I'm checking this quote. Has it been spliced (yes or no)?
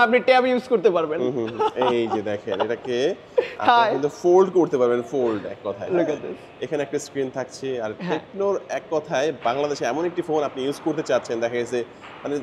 no